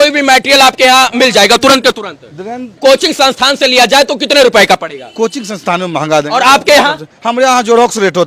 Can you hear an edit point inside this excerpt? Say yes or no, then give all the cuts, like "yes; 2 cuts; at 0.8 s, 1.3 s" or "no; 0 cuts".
yes; 1 cut; at 2.8 s